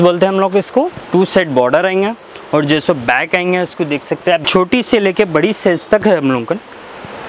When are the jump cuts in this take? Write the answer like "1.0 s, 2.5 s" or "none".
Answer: 1.0 s, 4.4 s